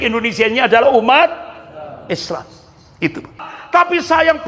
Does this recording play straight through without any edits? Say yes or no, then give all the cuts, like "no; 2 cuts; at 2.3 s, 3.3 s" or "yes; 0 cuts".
no; 1 cut; at 3.6 s